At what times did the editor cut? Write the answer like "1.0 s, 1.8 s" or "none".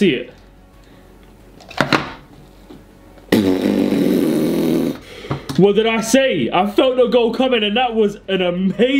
none